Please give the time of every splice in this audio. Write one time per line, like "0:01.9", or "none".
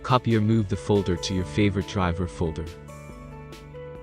0:02.6